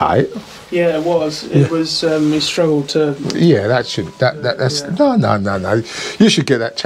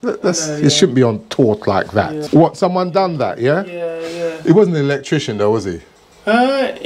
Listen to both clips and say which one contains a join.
second; 1 cut; at 2.2 s

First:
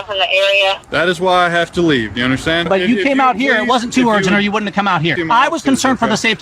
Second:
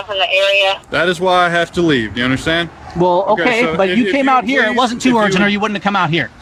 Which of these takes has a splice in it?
first; 2 cuts; at 2.6 s, 5.2 s

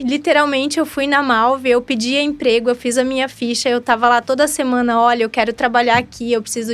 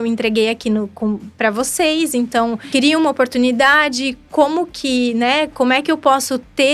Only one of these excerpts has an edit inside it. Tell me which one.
second; 1 cut; at 2.6 s

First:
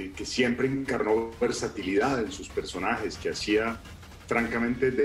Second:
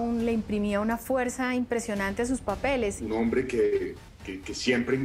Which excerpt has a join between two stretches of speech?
second; 1 cut; at 3.0 s

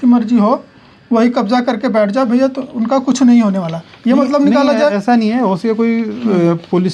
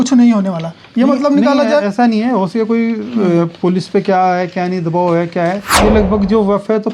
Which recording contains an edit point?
second; 1 cut; at 5.7 s

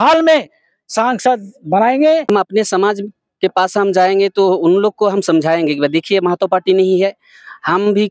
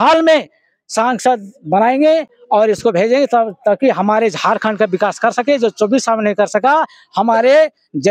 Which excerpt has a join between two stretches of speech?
first; 1 cut; at 2.2 s

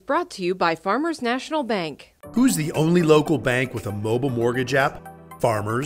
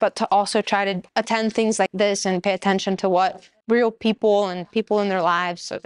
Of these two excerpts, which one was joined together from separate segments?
second; 3 cuts; at 1.0 s, 1.9 s, 3.6 s

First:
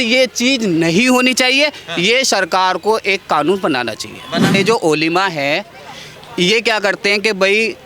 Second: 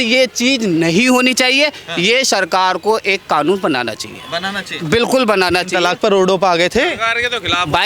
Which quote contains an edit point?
first; 1 cut; at 4.5 s

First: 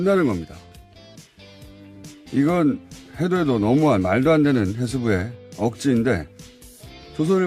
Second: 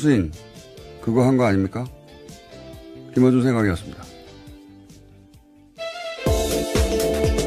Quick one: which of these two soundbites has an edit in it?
first; 1 cut; at 5.8 s

